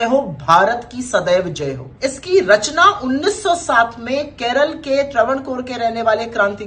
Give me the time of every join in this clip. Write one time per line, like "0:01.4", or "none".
0:01.9